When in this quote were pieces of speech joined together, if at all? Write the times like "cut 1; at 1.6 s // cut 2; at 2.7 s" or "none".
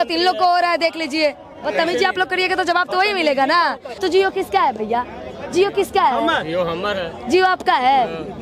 cut 1; at 1.7 s // cut 2; at 3.9 s